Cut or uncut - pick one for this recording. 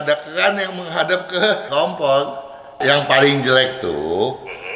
cut